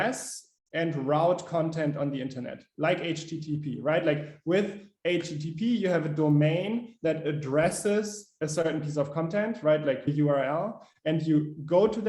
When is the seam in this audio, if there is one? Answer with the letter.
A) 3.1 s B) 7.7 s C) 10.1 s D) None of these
C